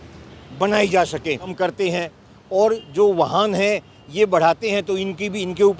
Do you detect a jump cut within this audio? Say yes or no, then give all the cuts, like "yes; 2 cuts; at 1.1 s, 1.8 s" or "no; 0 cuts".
yes; 1 cut; at 1.5 s